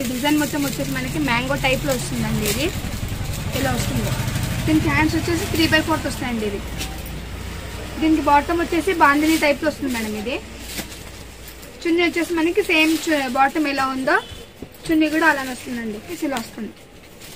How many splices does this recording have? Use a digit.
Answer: 0